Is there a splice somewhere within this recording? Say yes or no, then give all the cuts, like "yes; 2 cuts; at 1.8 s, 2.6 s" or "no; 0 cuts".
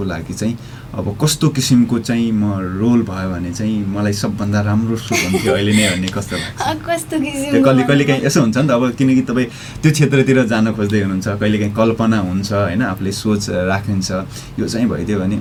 no; 0 cuts